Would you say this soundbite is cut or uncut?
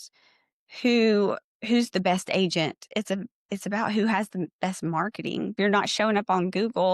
cut